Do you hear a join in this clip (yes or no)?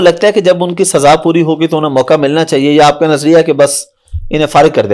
no